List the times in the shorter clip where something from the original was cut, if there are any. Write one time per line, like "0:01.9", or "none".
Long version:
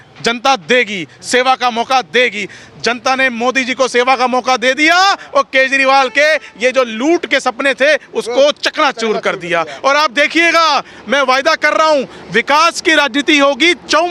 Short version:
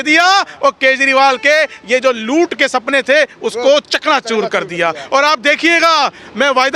none

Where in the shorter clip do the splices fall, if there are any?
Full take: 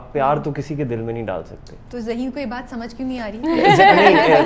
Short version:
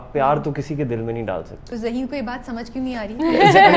0:01.6

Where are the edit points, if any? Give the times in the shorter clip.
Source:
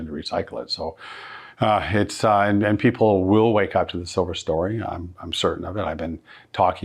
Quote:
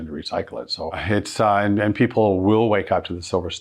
0:01.0

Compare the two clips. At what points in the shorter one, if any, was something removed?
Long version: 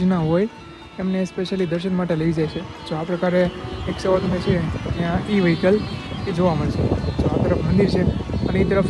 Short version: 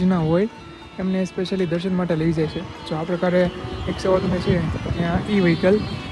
none

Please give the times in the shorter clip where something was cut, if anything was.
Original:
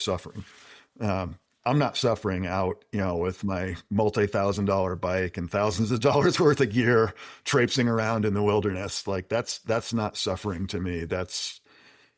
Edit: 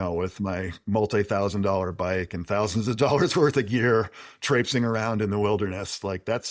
none

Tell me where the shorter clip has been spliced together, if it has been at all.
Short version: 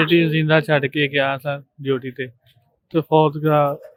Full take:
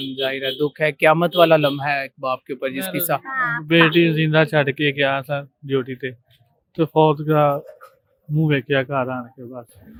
none

